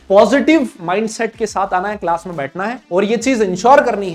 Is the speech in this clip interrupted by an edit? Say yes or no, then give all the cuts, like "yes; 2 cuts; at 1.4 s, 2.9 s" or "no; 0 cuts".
no; 0 cuts